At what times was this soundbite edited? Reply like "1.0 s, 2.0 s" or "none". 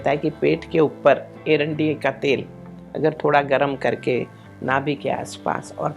1.3 s